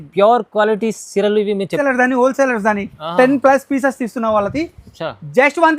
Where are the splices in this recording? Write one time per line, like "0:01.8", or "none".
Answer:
0:01.7